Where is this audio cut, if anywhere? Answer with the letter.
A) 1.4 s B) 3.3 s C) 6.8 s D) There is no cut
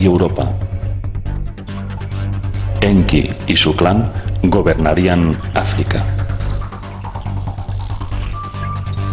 B